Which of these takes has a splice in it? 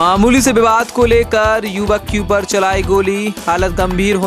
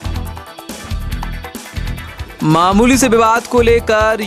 second; 1 cut; at 1.7 s

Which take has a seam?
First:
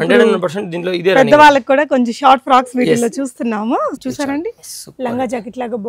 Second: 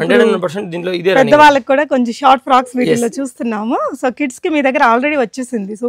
first; 1 cut; at 4.0 s

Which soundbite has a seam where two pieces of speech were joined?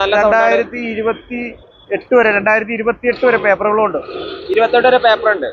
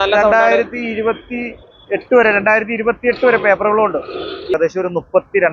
second; 1 cut; at 4.5 s

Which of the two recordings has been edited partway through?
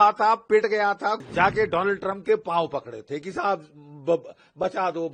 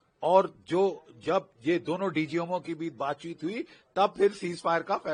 first; 1 cut; at 1.2 s

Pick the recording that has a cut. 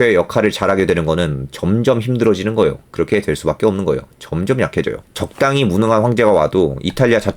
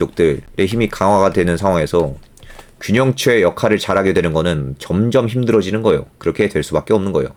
first; 1 cut; at 5.0 s

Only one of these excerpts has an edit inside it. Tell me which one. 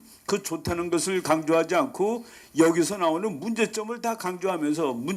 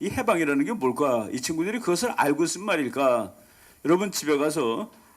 second; 1 cut; at 3.2 s

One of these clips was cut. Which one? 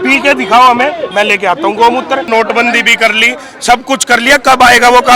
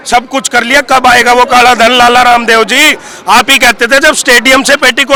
first; 1 cut; at 2.2 s

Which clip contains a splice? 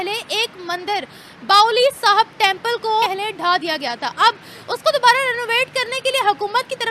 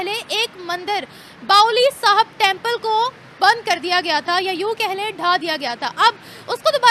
first; 1 cut; at 3.1 s

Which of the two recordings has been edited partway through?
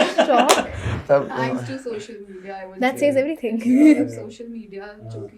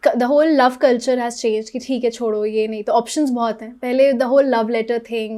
first; 1 cut; at 0.9 s

